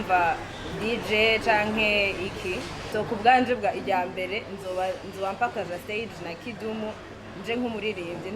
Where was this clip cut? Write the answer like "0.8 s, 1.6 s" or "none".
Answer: 2.8 s